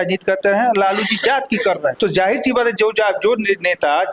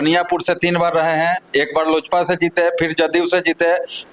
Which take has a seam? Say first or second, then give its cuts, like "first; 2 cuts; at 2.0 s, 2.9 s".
first; 1 cut; at 2.0 s